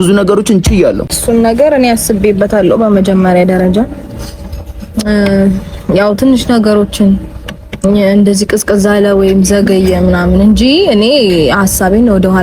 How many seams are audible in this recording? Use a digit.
1